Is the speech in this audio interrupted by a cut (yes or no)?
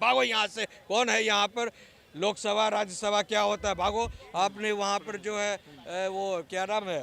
no